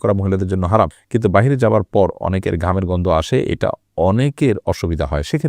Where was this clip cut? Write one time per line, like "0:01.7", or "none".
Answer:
0:01.0